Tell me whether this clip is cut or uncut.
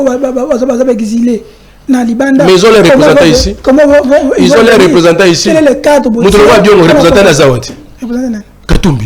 uncut